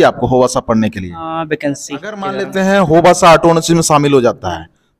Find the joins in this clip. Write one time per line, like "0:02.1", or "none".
0:02.4